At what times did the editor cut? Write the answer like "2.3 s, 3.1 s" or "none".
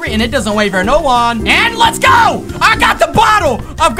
1.4 s